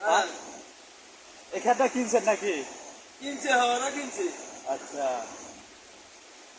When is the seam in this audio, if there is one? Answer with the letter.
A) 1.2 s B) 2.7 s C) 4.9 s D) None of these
D